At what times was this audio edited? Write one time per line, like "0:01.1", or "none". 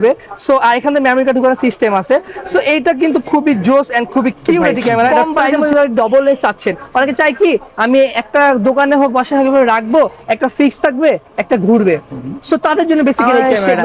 0:05.1